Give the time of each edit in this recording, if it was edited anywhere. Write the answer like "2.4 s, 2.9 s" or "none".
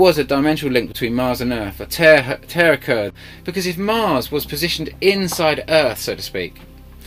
4.4 s